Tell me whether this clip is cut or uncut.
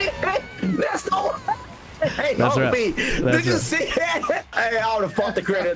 cut